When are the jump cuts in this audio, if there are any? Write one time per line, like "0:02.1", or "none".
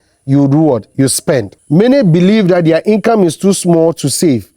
0:01.5